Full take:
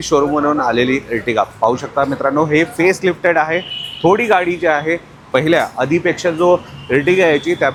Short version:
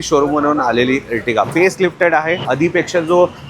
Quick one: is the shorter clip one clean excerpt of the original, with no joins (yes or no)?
no